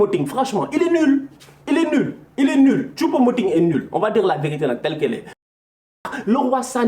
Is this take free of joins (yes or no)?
no